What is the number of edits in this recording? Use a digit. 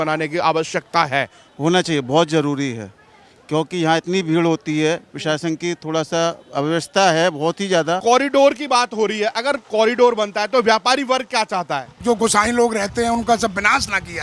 3